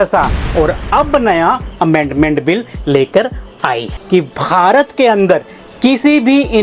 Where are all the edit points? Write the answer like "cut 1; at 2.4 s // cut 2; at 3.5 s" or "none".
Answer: cut 1; at 3.9 s